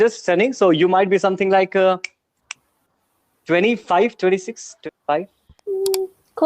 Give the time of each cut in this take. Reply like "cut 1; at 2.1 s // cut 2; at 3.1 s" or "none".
cut 1; at 4.7 s